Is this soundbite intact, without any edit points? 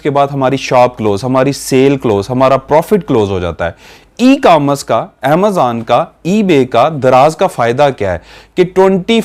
yes; 0 cuts

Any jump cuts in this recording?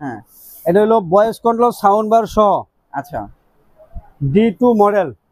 no; 0 cuts

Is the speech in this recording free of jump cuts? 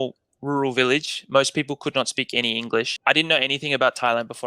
no; 1 cut; at 3.0 s

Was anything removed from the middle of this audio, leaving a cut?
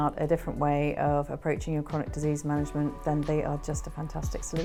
no; 0 cuts

